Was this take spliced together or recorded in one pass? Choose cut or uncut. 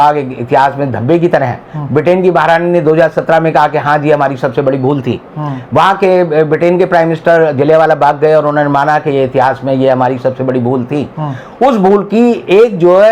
uncut